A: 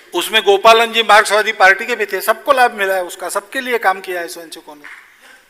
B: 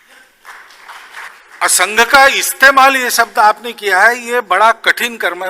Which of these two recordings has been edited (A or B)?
B